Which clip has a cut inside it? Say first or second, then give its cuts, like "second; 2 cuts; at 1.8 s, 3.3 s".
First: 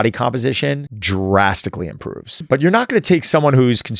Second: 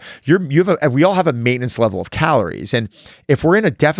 first; 2 cuts; at 0.9 s, 2.4 s